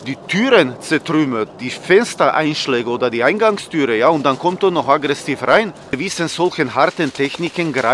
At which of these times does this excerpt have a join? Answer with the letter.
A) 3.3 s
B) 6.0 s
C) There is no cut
B